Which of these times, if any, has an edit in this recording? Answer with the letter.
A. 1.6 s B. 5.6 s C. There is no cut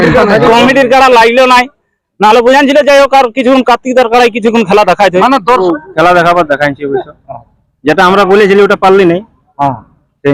B